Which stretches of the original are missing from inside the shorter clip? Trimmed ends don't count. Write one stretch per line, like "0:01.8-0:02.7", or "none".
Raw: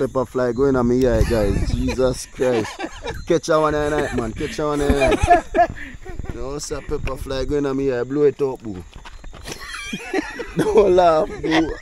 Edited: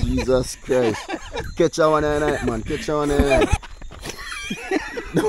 0:05.2-0:08.9